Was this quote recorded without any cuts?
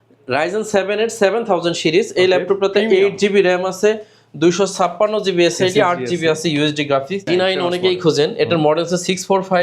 no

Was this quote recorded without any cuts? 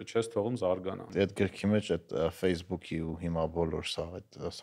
no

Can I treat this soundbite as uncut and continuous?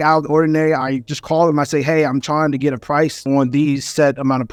yes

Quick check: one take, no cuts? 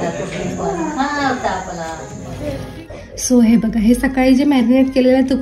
yes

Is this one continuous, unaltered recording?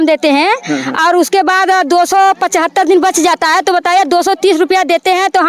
yes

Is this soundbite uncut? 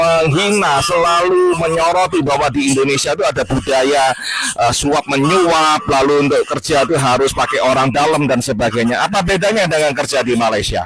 yes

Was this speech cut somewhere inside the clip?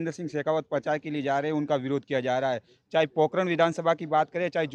no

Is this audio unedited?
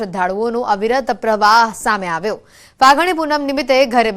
yes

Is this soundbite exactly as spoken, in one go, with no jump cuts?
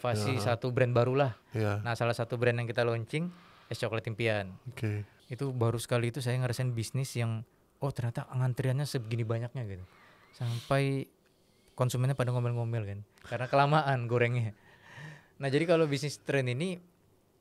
no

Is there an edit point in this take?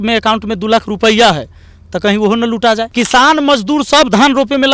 yes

